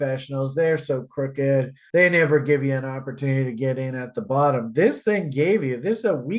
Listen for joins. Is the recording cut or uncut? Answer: uncut